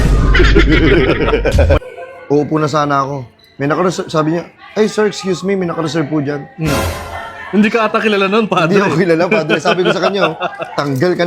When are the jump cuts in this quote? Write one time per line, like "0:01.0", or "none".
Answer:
0:01.8